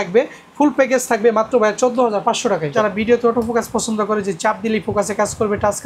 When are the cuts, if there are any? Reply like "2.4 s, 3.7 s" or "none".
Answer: 2.7 s